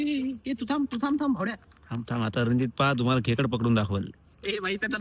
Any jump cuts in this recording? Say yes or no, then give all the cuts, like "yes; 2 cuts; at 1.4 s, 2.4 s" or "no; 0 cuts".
no; 0 cuts